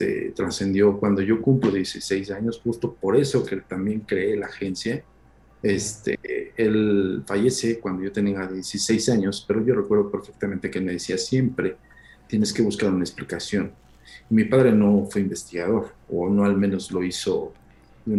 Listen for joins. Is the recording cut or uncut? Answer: uncut